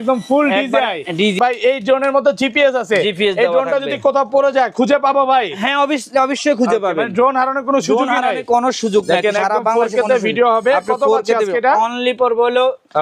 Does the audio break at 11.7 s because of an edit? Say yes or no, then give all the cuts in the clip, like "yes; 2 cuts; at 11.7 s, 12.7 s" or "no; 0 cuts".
no; 1 cut; at 1.4 s